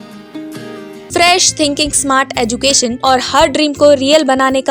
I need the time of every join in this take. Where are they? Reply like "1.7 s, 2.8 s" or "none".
1.0 s, 3.0 s